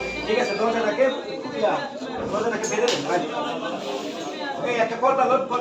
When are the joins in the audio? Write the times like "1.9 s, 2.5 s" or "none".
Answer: none